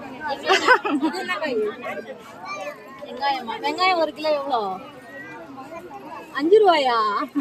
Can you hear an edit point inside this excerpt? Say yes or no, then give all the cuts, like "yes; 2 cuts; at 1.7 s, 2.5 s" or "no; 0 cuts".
no; 0 cuts